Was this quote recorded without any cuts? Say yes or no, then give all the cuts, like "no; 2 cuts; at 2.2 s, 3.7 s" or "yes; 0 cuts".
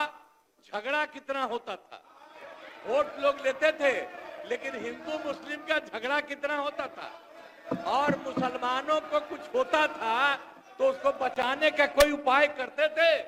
yes; 0 cuts